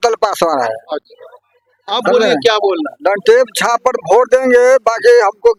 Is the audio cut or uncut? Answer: uncut